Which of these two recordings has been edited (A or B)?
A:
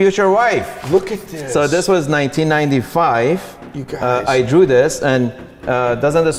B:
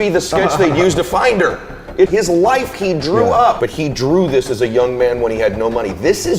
B